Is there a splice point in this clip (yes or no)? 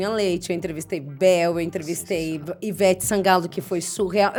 no